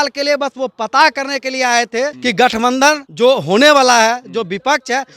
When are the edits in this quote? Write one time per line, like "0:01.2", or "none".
0:02.2
0:03.1